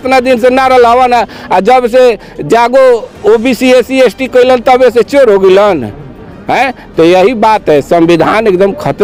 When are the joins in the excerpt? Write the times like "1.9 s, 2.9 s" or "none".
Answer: none